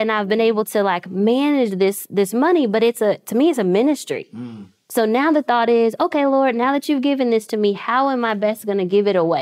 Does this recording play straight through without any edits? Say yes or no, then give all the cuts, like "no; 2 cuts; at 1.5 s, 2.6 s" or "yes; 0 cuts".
yes; 0 cuts